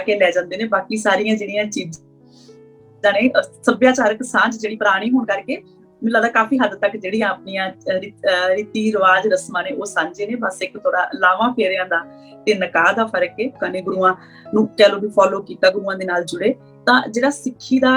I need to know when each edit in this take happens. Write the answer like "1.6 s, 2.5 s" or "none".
13.6 s